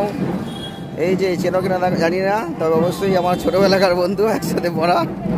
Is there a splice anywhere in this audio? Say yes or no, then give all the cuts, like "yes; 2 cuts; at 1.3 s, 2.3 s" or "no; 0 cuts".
no; 0 cuts